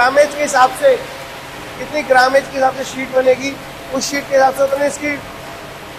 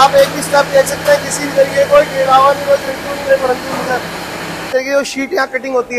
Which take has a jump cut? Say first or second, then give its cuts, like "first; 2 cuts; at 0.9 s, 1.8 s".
second; 1 cut; at 4.6 s